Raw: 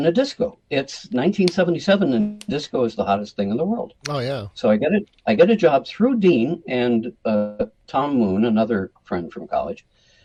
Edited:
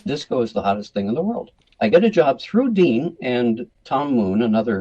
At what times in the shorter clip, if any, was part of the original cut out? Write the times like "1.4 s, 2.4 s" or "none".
1.7 s, 3.7 s